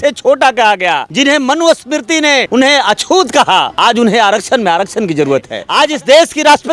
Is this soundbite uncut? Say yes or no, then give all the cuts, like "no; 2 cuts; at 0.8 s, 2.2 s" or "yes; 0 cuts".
no; 4 cuts; at 1.1 s, 2.5 s, 3.7 s, 5.6 s